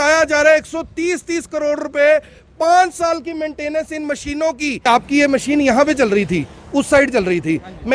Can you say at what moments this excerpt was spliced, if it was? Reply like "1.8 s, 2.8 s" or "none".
4.9 s